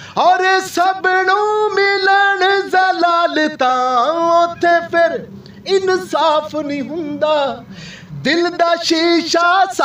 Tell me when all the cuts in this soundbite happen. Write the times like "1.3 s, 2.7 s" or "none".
none